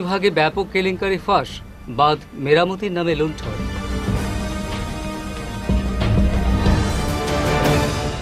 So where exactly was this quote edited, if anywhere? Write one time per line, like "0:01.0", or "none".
none